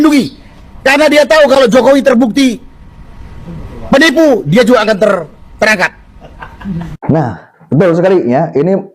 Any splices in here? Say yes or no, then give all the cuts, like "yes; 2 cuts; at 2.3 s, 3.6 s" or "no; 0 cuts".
no; 0 cuts